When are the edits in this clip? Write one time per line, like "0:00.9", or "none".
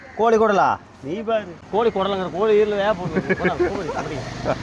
0:01.6